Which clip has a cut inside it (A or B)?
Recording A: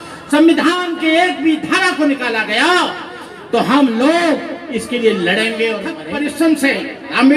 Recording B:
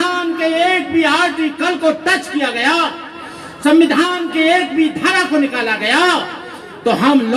A